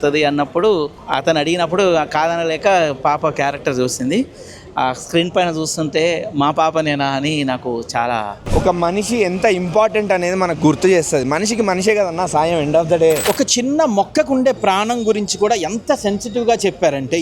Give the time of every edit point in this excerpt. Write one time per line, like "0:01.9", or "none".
0:01.0
0:08.4
0:13.2